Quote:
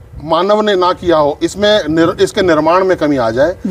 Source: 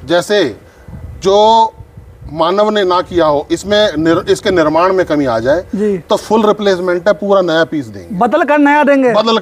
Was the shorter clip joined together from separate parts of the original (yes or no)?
no